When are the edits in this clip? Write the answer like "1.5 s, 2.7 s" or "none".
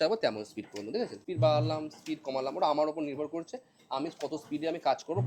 1.2 s